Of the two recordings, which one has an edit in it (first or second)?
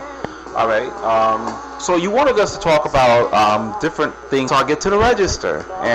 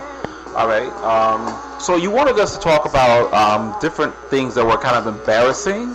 second